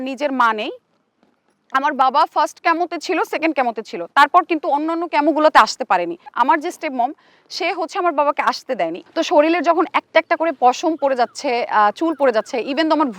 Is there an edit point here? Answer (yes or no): yes